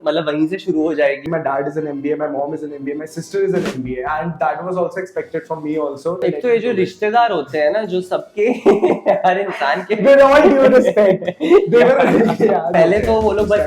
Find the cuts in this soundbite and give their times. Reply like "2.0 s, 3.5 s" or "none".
1.2 s, 6.2 s, 12.7 s